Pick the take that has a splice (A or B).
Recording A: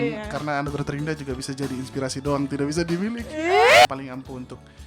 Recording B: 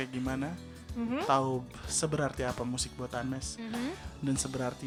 A